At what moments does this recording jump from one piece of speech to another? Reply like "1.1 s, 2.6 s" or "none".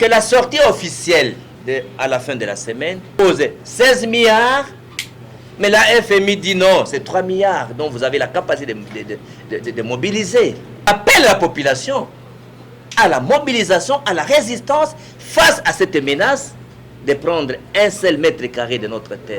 1.5 s, 3.2 s, 10.9 s